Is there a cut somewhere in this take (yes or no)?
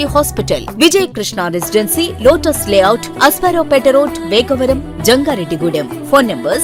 no